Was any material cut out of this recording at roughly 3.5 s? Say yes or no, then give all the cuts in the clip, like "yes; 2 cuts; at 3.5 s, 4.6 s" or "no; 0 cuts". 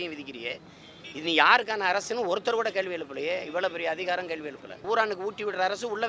no; 1 cut; at 4.8 s